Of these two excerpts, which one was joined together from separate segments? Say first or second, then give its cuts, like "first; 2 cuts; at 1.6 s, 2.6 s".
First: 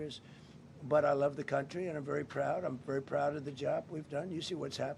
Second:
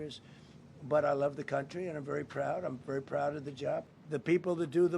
second; 1 cut; at 3.9 s